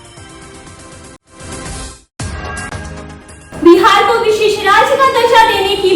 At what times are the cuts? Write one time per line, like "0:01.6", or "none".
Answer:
0:03.4